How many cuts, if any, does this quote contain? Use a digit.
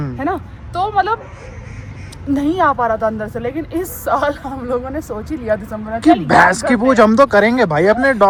0